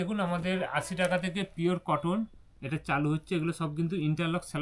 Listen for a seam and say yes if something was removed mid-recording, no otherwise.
no